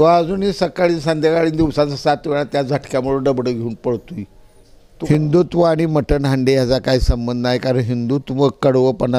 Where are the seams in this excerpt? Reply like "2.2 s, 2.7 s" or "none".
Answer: 5.1 s